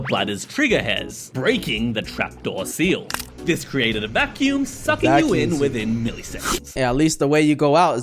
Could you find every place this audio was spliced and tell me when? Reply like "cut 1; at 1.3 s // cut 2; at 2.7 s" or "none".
cut 1; at 6.8 s